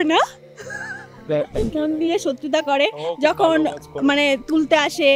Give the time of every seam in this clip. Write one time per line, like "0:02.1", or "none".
0:01.5